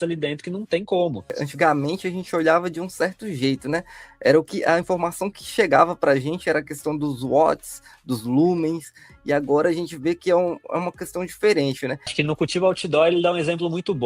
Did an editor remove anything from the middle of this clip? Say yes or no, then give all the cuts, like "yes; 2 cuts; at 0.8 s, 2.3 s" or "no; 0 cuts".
yes; 2 cuts; at 1.4 s, 12.0 s